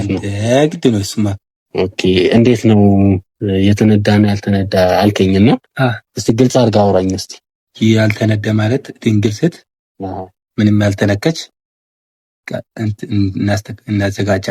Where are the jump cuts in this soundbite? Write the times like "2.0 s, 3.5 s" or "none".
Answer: none